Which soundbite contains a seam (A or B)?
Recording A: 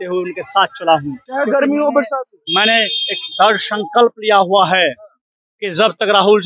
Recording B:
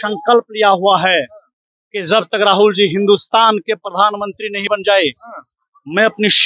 A